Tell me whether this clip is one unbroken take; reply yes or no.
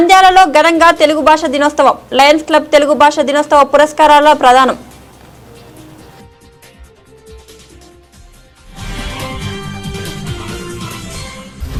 yes